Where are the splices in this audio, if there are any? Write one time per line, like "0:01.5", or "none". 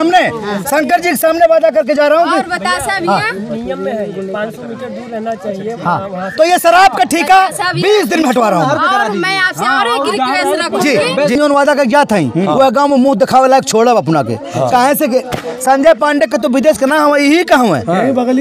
0:11.3